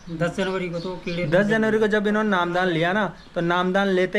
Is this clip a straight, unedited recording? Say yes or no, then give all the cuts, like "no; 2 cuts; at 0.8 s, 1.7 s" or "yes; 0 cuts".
yes; 0 cuts